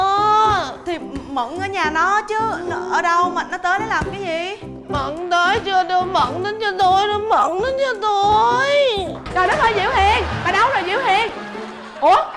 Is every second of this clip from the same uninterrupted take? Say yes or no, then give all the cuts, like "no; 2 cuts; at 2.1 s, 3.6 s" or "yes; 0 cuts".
no; 1 cut; at 9.2 s